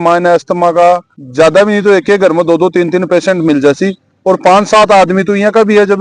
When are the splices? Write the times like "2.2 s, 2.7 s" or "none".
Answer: 1.2 s